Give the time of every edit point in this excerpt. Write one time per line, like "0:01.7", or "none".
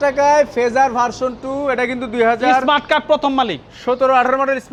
none

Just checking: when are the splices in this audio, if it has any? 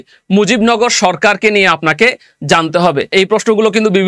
0:03.1

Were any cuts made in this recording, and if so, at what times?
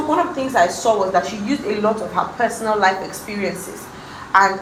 none

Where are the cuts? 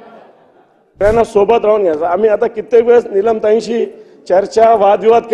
0:01.0

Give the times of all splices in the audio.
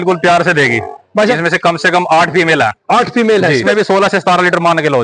0:01.4
0:03.7

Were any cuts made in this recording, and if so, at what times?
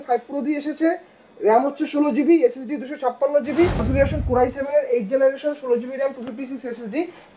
0:03.9

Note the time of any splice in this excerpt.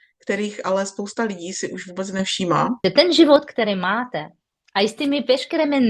0:02.8

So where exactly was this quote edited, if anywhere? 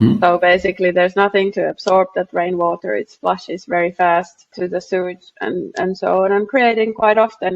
0:04.5

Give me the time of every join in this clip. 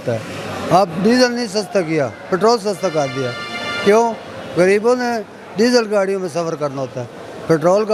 none

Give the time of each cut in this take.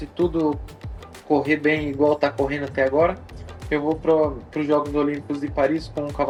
none

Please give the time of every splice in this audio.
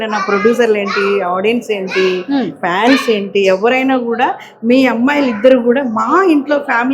none

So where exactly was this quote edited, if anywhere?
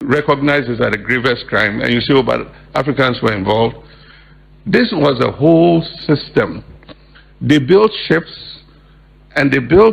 none

